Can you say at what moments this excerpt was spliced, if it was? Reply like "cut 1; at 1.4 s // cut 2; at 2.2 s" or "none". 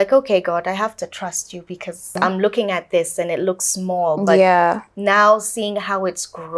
cut 1; at 2.2 s